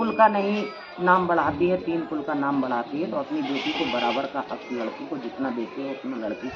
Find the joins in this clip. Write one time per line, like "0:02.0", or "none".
none